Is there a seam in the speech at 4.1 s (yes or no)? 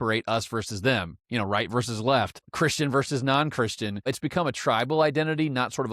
yes